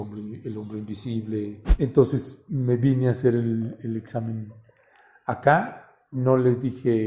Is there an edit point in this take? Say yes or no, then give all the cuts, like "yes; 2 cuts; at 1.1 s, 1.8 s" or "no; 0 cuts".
yes; 1 cut; at 1.6 s